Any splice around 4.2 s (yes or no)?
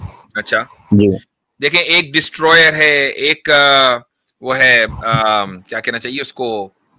no